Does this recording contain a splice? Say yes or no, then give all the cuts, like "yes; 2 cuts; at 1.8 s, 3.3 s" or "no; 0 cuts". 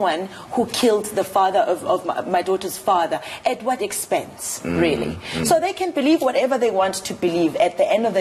no; 0 cuts